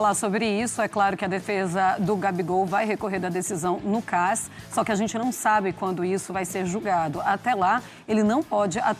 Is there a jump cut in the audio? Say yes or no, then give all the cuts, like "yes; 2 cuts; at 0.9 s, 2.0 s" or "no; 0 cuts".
no; 0 cuts